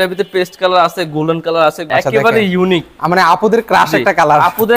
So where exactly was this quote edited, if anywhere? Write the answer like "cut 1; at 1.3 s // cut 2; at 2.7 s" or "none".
cut 1; at 1.8 s